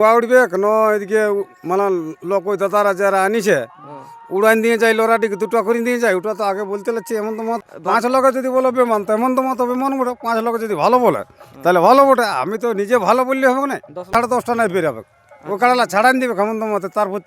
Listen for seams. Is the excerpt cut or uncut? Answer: cut